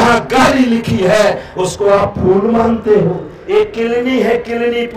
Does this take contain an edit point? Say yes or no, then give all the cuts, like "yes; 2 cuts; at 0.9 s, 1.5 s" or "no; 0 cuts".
yes; 1 cut; at 3.4 s